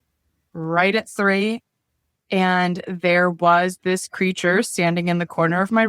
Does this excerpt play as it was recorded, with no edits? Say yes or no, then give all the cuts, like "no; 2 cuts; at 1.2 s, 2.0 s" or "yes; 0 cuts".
yes; 0 cuts